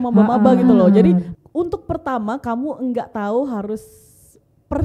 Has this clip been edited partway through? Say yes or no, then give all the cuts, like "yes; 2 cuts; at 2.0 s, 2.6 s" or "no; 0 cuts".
yes; 1 cut; at 1.3 s